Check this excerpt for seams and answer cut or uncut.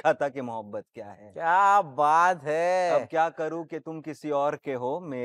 uncut